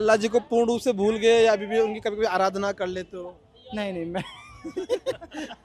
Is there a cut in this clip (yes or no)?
no